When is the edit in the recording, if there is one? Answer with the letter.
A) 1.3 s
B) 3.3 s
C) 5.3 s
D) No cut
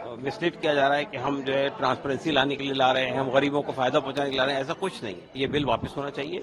C